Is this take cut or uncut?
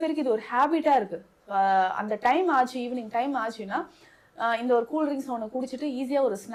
uncut